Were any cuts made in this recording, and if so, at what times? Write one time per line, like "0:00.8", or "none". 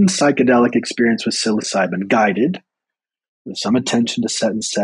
none